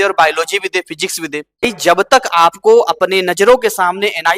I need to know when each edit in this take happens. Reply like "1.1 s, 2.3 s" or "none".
1.6 s

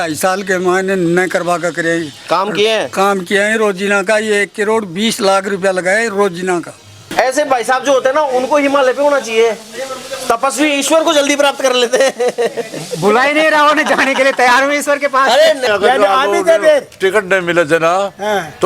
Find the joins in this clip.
7.1 s, 15.6 s

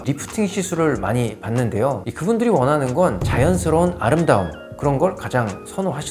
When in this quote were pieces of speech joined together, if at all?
3.2 s

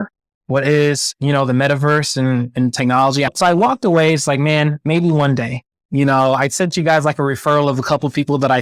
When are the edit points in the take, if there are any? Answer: 3.3 s

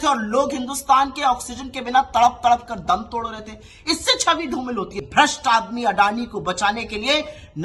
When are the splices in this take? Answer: 5.0 s

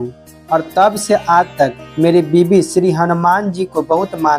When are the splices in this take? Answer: 1.8 s

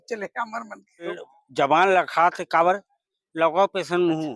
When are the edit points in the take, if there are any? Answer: 1.2 s

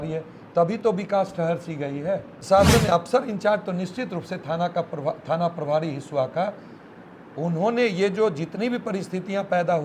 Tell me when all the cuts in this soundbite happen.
2.4 s

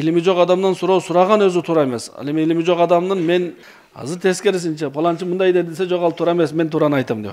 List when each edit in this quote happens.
3.6 s

